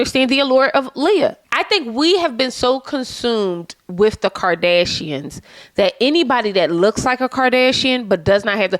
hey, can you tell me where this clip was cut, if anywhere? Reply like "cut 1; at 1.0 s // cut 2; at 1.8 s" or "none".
cut 1; at 1.4 s